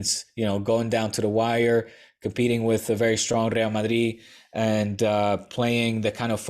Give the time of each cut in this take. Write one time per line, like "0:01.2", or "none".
none